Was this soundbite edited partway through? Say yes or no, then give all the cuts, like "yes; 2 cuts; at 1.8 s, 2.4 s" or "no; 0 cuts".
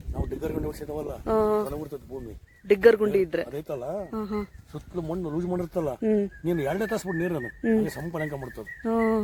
no; 0 cuts